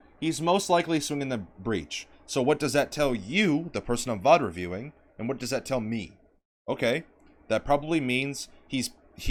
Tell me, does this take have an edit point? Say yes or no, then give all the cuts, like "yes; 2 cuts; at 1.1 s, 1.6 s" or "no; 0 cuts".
no; 0 cuts